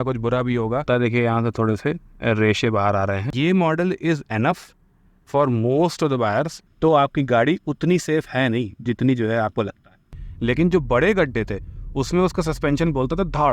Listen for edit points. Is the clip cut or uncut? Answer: cut